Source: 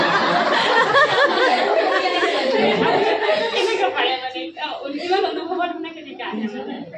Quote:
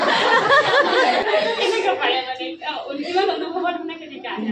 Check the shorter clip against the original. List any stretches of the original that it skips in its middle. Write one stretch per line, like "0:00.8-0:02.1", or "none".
0:01.7-0:03.2